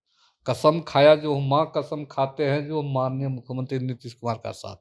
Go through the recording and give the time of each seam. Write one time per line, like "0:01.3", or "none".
none